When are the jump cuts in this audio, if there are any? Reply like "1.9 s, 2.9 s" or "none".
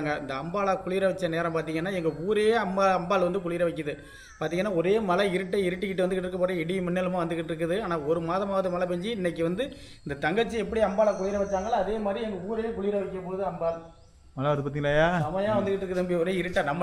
none